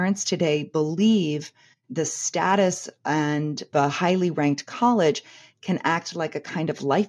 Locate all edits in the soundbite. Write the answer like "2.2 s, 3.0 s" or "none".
1.9 s